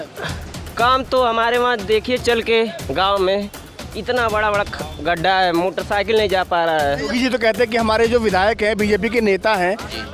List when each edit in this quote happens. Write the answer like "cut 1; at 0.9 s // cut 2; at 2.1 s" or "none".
cut 1; at 7.0 s